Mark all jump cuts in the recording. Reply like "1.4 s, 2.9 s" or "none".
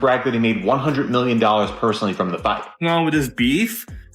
2.8 s